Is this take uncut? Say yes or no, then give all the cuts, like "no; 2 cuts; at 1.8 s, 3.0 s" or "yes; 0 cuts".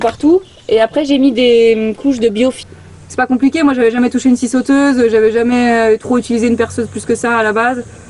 no; 1 cut; at 2.6 s